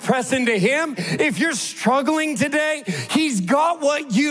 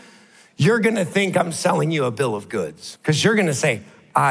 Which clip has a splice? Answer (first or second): second